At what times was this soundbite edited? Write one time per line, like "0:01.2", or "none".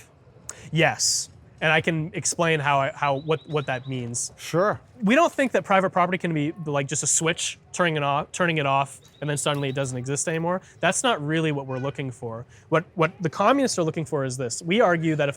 0:04.9